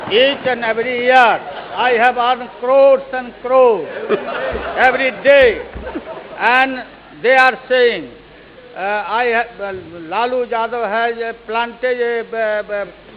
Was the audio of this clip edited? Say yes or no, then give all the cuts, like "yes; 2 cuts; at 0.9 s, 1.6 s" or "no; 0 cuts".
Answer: no; 0 cuts